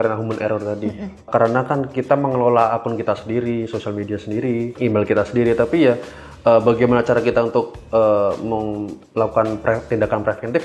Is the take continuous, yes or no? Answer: no